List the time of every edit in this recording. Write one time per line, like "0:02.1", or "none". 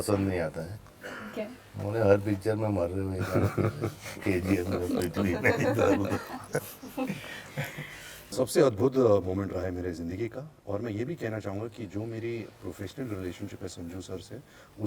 0:08.2